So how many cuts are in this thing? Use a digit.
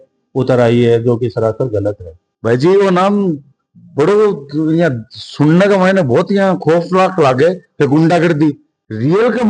0